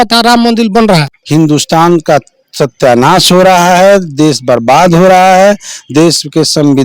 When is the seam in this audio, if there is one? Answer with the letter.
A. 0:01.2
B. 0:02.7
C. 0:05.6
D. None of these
A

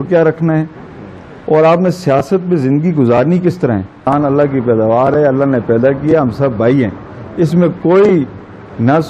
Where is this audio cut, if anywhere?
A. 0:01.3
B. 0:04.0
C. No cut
B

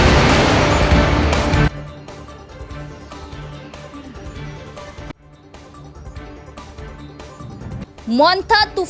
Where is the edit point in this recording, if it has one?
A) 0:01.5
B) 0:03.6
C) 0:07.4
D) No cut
A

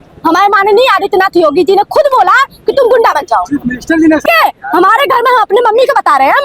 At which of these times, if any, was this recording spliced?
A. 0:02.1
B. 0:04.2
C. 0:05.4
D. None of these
B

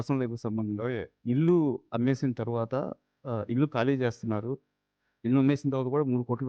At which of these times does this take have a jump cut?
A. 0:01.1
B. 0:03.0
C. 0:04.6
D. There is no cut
A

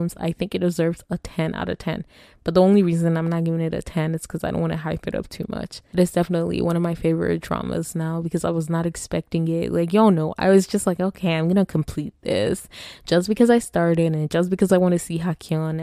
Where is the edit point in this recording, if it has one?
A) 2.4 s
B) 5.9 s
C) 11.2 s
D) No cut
B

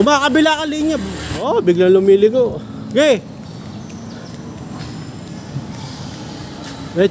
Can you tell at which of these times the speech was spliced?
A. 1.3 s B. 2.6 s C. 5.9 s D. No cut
A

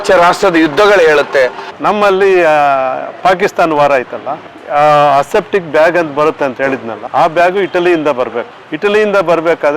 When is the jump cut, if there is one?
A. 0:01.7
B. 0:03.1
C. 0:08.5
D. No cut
A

